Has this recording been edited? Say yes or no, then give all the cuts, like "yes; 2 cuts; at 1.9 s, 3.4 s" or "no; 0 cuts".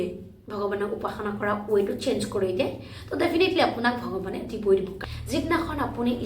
yes; 1 cut; at 4.9 s